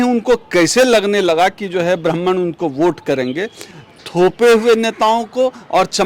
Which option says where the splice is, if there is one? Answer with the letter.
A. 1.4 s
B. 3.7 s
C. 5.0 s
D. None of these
B